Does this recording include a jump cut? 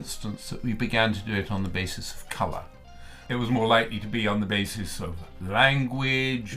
yes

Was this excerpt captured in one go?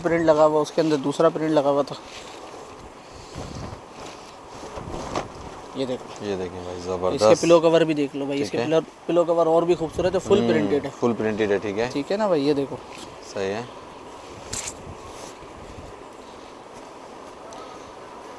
yes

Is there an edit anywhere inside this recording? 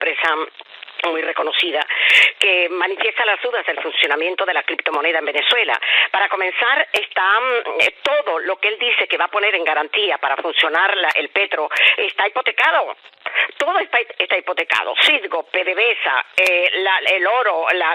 no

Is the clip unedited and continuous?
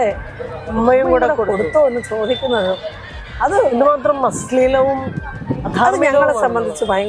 yes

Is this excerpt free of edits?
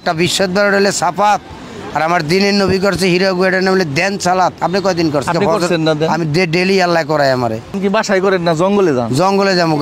no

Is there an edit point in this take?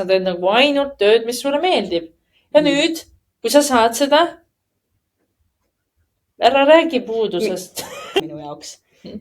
yes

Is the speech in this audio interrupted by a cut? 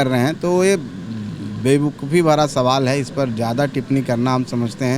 no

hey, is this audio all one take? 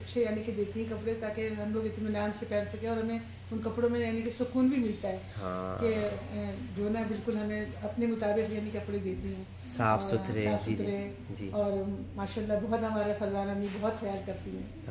yes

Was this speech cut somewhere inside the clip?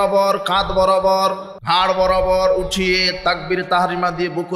yes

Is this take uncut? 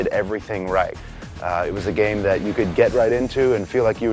yes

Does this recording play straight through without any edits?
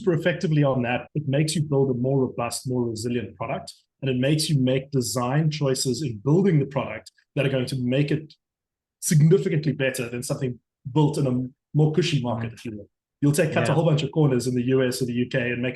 no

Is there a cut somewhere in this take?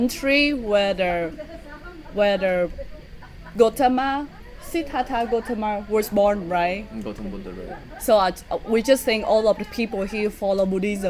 no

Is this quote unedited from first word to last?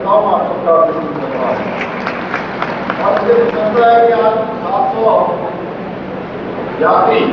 yes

